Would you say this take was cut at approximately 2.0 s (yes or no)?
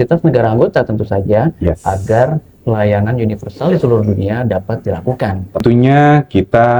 no